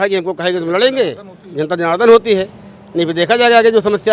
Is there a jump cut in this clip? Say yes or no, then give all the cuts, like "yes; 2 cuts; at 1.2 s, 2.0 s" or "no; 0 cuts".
no; 0 cuts